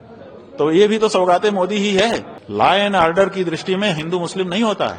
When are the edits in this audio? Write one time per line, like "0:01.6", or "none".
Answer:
0:02.3